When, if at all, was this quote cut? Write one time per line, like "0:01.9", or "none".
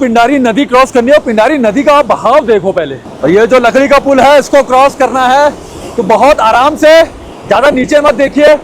0:03.0